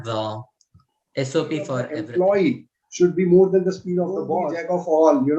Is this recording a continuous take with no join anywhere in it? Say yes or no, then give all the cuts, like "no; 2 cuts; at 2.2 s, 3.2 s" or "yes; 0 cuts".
no; 2 cuts; at 2.0 s, 4.4 s